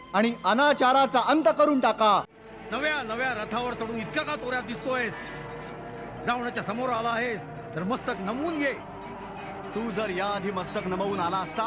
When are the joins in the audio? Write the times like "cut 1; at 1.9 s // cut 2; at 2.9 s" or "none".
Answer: cut 1; at 2.4 s

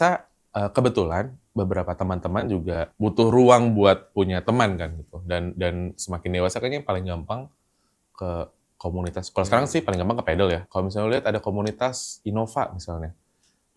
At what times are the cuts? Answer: cut 1; at 2.9 s // cut 2; at 10.7 s

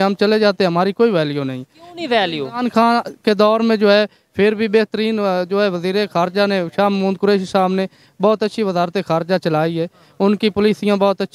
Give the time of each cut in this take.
none

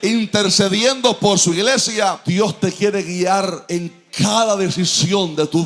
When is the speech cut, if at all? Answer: cut 1; at 2.2 s // cut 2; at 3.6 s

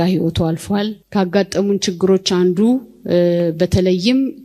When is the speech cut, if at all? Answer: cut 1; at 1.0 s

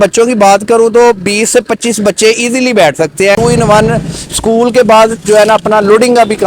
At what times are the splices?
cut 1; at 3.4 s

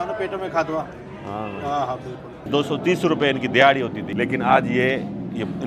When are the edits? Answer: cut 1; at 2.4 s // cut 2; at 4.0 s

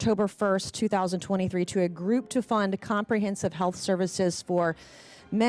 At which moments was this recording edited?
none

